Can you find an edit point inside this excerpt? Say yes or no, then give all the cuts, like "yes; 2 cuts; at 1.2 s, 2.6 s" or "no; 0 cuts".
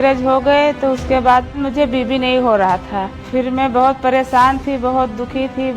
no; 0 cuts